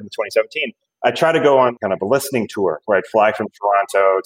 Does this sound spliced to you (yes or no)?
no